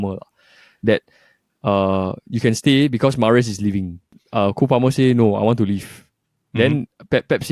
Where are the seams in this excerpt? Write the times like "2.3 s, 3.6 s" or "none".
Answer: 4.2 s